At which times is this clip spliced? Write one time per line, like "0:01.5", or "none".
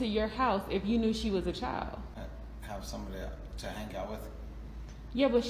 0:02.2